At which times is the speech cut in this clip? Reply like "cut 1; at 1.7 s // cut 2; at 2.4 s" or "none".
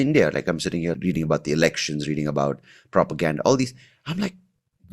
cut 1; at 1.0 s